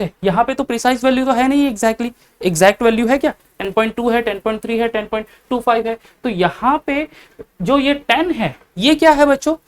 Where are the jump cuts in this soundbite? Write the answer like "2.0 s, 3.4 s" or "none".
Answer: none